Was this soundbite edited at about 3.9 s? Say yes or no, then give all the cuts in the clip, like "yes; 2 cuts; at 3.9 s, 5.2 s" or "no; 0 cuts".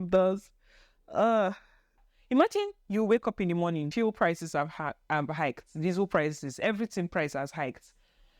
yes; 2 cuts; at 2.1 s, 3.9 s